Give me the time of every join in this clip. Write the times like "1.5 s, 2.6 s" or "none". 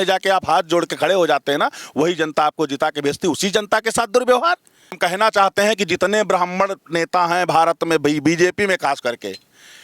5.0 s